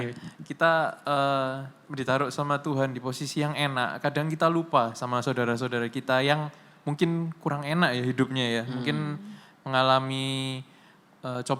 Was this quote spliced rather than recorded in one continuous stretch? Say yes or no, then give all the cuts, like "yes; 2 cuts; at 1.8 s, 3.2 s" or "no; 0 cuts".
no; 0 cuts